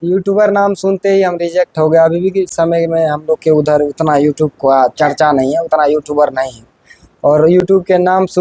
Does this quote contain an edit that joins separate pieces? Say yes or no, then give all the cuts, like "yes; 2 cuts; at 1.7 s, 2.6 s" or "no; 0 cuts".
no; 0 cuts